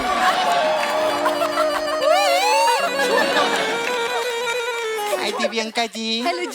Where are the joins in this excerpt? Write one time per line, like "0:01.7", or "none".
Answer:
0:05.1